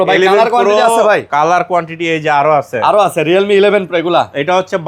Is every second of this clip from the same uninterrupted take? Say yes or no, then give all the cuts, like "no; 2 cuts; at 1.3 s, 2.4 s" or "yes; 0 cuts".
yes; 0 cuts